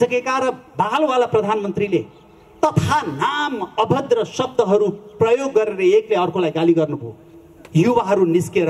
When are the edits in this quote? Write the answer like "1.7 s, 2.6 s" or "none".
none